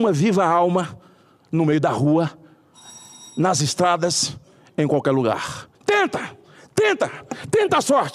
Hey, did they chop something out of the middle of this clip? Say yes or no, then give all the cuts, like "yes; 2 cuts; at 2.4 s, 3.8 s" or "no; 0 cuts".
yes; 1 cut; at 5.7 s